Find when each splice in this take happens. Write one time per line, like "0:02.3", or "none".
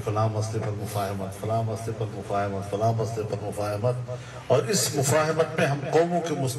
0:02.8